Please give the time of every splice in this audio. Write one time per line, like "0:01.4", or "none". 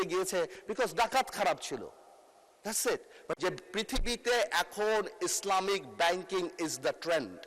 0:03.4